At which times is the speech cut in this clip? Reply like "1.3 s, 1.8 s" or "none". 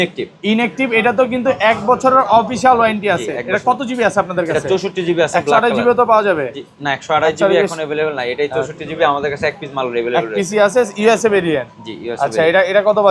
none